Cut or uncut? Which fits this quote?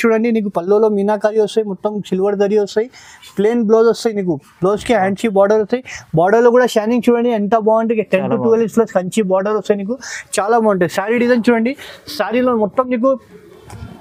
uncut